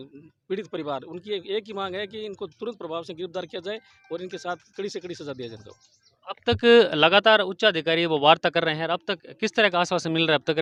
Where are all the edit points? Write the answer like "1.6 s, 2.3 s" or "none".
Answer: none